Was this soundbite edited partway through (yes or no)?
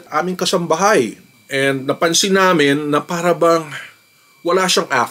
no